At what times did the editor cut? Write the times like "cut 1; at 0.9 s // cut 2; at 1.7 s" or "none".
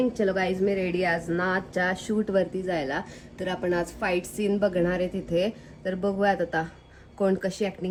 none

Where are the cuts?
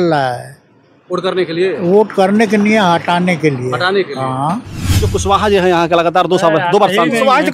cut 1; at 4.9 s

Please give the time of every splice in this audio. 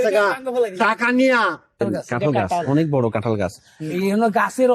cut 1; at 1.8 s

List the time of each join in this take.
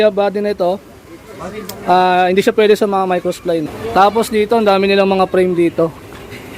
cut 1; at 3.8 s

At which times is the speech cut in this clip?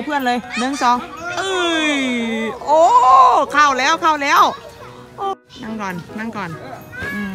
cut 1; at 5.3 s

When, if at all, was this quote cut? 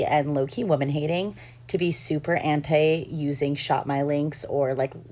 none

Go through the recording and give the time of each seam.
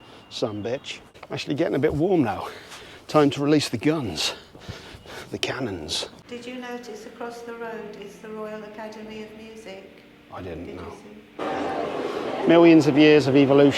cut 1; at 1.0 s // cut 2; at 6.2 s // cut 3; at 11.4 s

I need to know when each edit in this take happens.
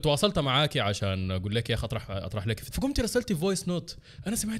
cut 1; at 2.6 s

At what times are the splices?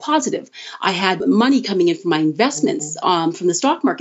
cut 1; at 1.2 s

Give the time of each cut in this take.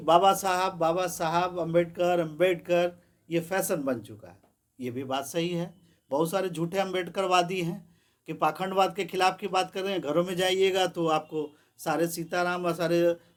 none

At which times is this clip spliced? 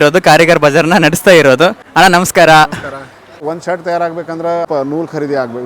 cut 1; at 1.8 s // cut 2; at 3.2 s // cut 3; at 4.7 s

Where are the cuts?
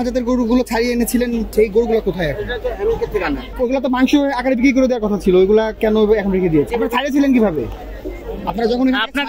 cut 1; at 1.5 s // cut 2; at 3.5 s // cut 3; at 6.7 s

